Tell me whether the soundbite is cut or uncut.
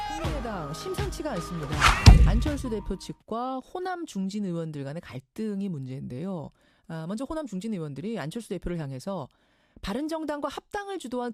uncut